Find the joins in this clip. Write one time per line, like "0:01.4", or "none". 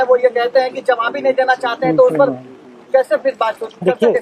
none